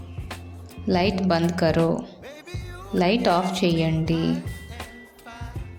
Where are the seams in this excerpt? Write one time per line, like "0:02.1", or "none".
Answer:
none